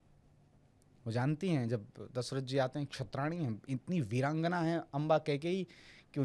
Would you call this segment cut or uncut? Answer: uncut